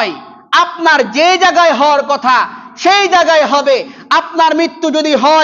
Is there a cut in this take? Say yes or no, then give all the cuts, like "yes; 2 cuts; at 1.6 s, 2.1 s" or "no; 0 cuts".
no; 0 cuts